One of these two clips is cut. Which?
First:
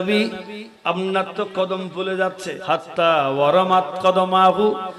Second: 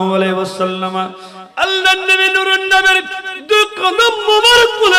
first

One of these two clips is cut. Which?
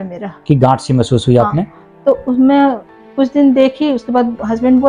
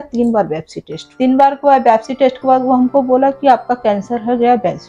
second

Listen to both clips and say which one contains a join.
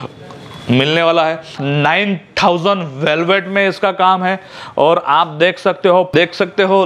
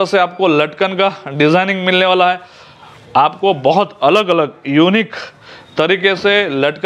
first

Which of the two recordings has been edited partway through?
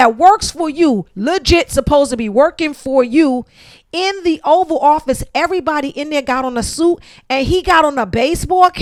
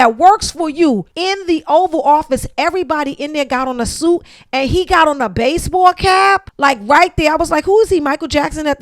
second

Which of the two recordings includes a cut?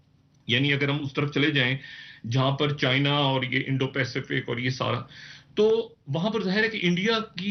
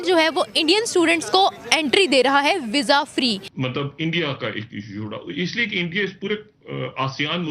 second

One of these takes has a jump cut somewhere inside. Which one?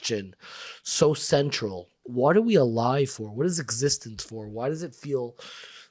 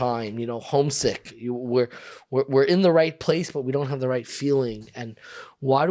first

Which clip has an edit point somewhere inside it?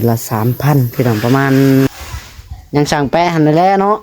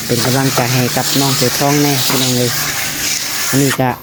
first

